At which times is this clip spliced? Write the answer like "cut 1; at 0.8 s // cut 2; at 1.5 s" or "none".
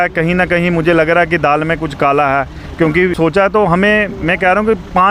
cut 1; at 3.2 s